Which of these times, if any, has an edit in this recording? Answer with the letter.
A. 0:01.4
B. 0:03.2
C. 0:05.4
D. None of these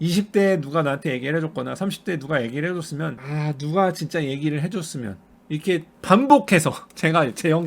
B